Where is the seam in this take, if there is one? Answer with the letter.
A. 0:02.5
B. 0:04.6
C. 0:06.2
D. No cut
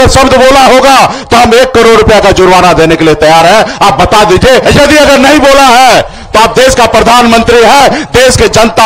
B